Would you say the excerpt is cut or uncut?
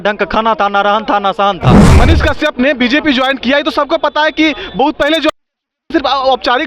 cut